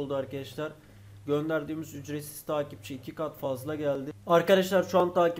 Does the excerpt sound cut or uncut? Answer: cut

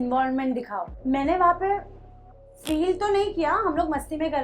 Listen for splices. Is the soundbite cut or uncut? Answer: cut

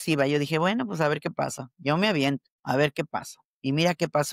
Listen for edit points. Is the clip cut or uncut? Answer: cut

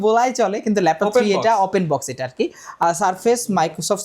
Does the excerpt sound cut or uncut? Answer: cut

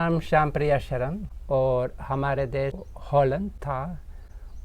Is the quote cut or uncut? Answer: cut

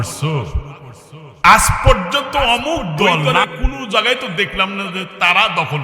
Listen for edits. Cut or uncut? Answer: cut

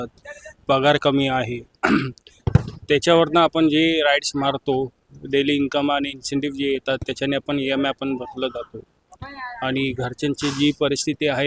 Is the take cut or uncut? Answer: uncut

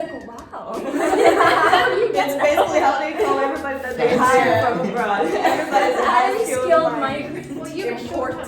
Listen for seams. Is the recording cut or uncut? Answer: cut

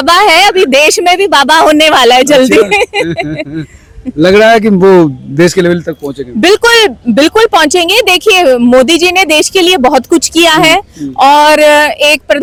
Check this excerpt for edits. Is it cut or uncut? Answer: uncut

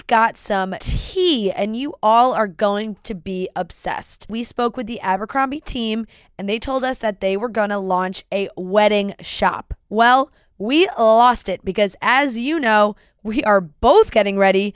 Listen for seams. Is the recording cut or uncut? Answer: uncut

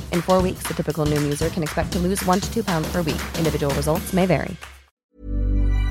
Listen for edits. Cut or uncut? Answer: cut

